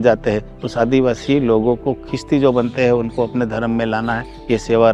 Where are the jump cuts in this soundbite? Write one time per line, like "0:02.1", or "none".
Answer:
none